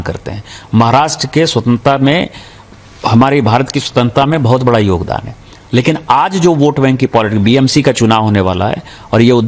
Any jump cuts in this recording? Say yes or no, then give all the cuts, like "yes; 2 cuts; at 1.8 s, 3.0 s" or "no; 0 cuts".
no; 0 cuts